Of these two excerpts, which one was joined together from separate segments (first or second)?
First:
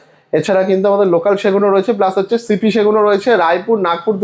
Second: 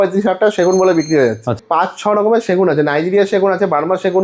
second